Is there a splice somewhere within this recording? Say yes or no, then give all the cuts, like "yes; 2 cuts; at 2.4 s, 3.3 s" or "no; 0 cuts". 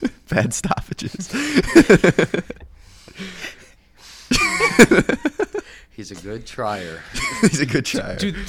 no; 0 cuts